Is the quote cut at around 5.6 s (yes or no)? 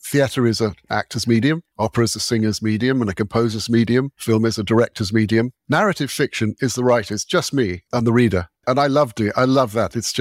no